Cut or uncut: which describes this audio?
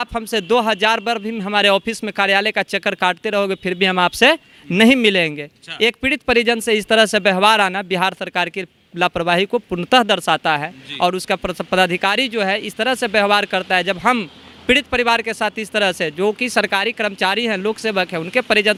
uncut